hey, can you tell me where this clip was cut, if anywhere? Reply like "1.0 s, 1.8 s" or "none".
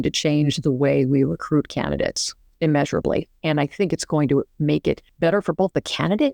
2.5 s, 5.1 s